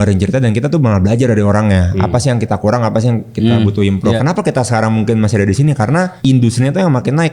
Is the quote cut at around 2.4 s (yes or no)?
no